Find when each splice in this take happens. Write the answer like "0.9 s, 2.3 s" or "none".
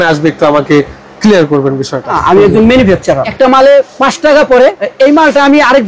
2.2 s, 3.3 s, 3.9 s, 4.8 s